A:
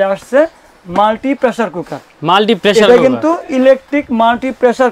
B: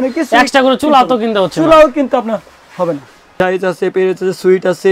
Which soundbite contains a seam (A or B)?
B